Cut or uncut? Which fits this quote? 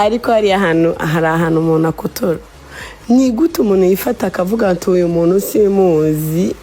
uncut